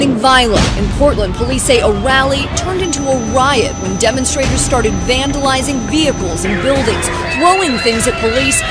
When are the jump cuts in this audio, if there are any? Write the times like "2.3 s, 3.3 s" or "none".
7.2 s